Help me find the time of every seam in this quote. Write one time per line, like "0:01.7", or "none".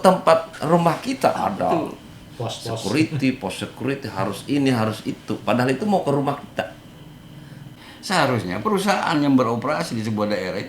0:07.7